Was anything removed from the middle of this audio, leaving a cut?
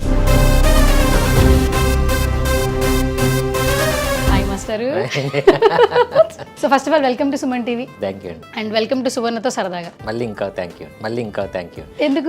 yes; 1 cut; at 6.5 s

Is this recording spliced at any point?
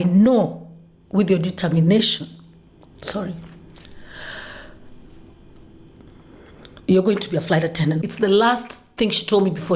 yes; 1 cut; at 8.0 s

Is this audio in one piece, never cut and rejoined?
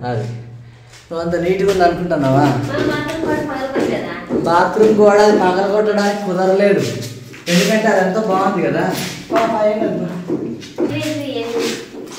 no; 1 cut; at 10.9 s

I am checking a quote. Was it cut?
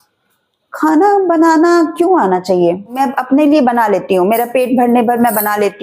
yes; 1 cut; at 3.0 s

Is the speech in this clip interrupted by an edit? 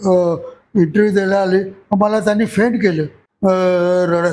yes; 1 cut; at 3.2 s

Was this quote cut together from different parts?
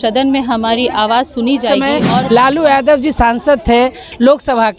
yes; 1 cut; at 1.7 s

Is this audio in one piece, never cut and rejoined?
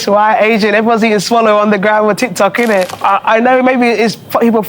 no; 1 cut; at 2.9 s

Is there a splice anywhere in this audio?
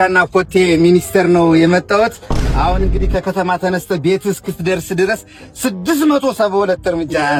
no; 0 cuts

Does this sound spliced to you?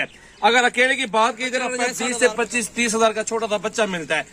yes; 1 cut; at 1.9 s

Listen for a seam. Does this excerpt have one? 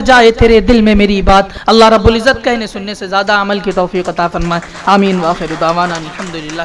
no; 0 cuts

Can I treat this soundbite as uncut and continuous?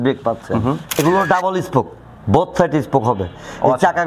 no; 1 cut; at 1.0 s

